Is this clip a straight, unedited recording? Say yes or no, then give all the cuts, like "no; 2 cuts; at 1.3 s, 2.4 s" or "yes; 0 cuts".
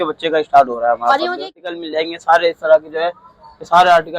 no; 1 cut; at 1.5 s